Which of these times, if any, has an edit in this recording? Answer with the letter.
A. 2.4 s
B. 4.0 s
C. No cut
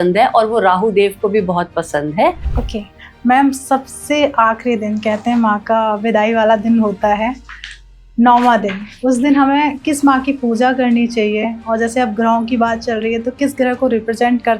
A